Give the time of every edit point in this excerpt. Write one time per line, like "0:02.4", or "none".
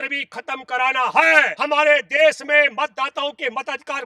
0:01.5